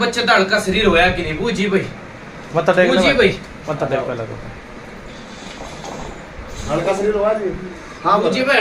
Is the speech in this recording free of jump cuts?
yes; 0 cuts

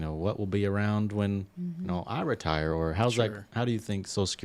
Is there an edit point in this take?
no; 0 cuts

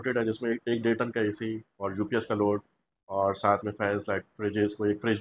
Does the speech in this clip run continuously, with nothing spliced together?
yes; 0 cuts

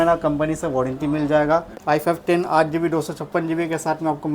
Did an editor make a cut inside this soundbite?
yes; 1 cut; at 1.7 s

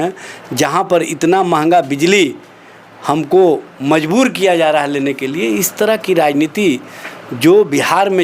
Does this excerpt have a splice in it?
no; 0 cuts

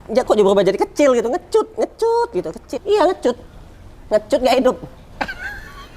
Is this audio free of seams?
no; 1 cut; at 2.7 s

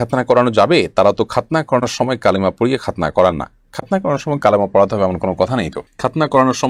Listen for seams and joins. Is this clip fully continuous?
yes; 0 cuts

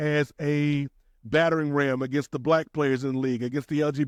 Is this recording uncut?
yes; 0 cuts

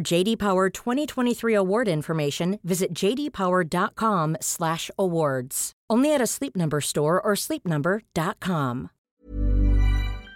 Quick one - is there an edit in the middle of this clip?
yes; 1 cut; at 9.0 s

